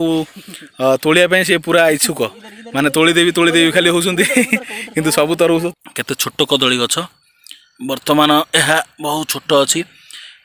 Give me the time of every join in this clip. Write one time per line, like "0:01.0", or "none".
0:05.7

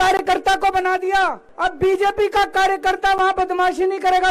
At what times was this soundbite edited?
0:01.4

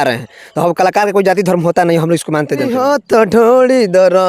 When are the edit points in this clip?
0:02.8

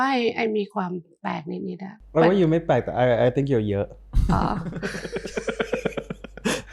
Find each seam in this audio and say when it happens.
none

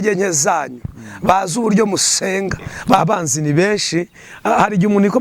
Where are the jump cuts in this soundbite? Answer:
0:03.0

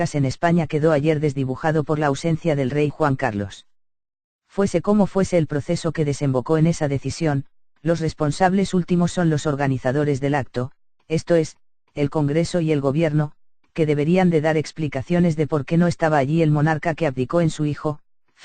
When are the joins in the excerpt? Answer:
0:13.2

